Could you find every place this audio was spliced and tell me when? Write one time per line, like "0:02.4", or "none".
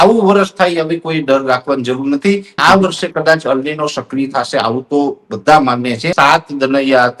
0:02.6
0:06.1